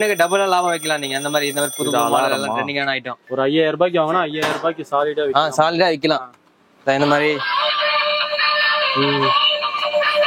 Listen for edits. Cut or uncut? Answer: uncut